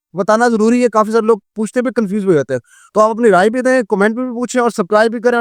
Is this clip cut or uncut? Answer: uncut